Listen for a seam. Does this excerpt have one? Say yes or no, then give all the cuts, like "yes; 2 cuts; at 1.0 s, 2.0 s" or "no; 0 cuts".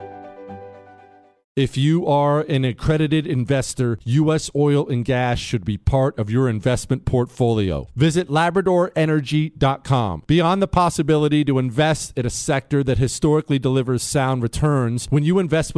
no; 0 cuts